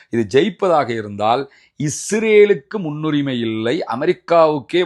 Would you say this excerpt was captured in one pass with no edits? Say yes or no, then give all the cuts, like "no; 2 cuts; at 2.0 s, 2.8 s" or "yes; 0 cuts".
yes; 0 cuts